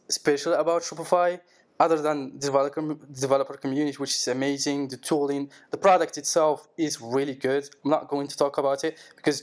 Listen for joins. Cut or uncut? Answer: uncut